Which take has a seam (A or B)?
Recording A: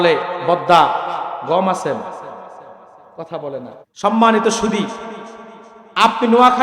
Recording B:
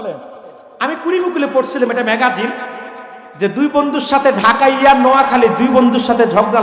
A